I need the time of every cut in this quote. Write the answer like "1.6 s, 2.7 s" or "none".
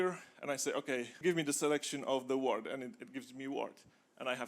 1.1 s